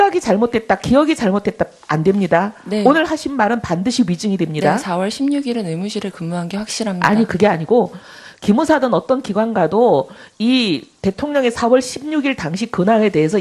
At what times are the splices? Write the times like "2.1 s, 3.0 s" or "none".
12.5 s